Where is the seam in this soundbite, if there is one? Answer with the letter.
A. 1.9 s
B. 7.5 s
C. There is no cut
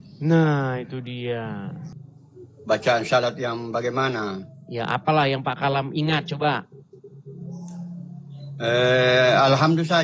A